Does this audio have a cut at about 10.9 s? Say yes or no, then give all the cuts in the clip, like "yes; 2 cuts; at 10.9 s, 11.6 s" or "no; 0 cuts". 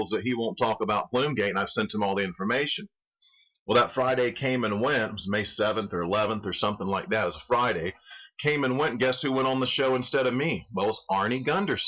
yes; 1 cut; at 10.9 s